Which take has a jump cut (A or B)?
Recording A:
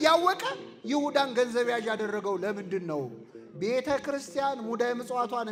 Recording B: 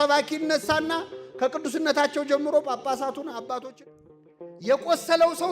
B